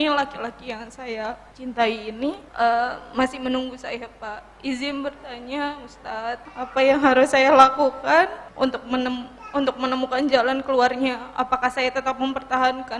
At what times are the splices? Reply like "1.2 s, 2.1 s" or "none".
1.5 s, 2.5 s, 6.5 s, 8.4 s